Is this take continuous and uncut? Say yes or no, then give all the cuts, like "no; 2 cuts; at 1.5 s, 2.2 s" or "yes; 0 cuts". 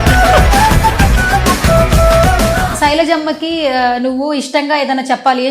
no; 1 cut; at 2.7 s